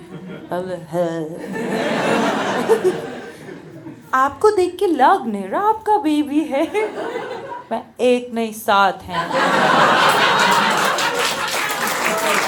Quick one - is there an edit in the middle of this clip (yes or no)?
no